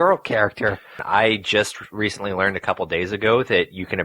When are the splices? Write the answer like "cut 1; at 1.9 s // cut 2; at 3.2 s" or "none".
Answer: cut 1; at 0.9 s